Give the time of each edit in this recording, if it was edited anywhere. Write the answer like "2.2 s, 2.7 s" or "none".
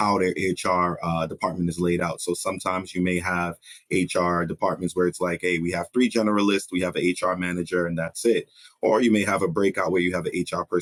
none